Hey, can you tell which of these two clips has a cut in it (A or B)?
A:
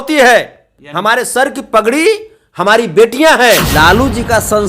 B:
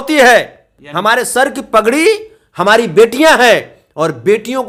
A